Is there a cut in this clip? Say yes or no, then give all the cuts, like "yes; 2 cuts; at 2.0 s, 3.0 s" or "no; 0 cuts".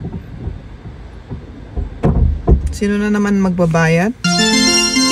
yes; 1 cut; at 4.2 s